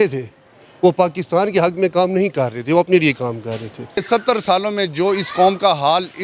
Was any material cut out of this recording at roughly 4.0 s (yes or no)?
yes